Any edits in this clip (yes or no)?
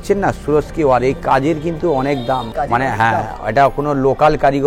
yes